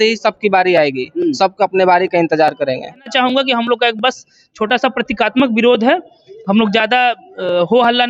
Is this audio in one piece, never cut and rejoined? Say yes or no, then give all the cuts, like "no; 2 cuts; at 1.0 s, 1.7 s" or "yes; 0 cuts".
no; 1 cut; at 3.1 s